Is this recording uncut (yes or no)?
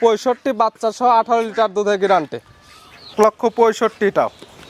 no